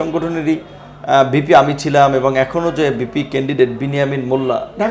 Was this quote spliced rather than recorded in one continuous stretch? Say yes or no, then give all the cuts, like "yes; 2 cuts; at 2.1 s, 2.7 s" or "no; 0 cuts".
no; 0 cuts